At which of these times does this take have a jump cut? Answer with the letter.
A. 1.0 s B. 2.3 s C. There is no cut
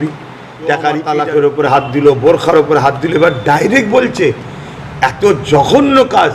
A